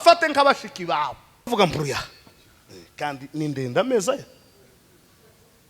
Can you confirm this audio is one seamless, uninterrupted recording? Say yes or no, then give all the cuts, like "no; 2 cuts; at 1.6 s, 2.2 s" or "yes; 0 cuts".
no; 1 cut; at 1.5 s